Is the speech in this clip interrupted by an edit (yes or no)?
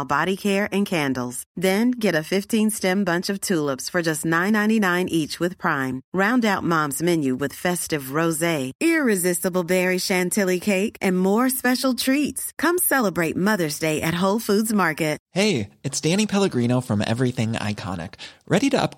yes